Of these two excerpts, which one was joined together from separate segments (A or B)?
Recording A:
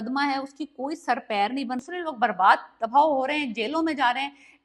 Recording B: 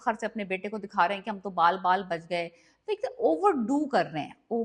A